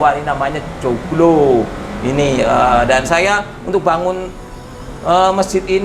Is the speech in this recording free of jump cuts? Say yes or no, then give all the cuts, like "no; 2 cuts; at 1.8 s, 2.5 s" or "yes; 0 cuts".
yes; 0 cuts